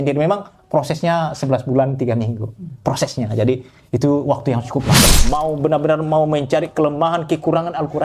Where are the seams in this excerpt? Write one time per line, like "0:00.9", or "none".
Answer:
0:05.1